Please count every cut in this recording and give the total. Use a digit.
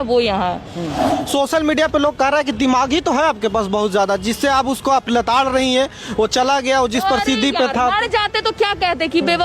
1